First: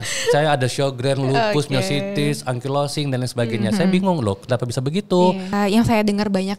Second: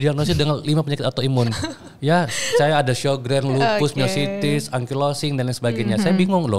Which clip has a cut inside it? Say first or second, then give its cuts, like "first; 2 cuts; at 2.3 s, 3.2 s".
first; 1 cut; at 5.5 s